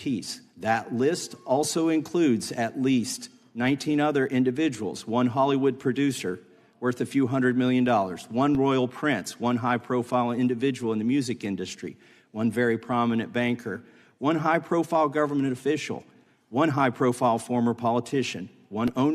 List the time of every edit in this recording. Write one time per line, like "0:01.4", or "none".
0:04.9